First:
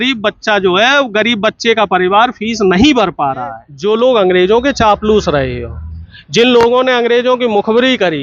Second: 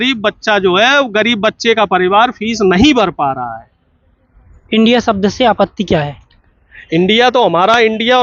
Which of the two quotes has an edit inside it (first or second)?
first